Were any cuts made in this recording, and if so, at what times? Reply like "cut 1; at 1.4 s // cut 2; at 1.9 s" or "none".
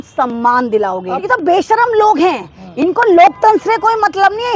cut 1; at 1.1 s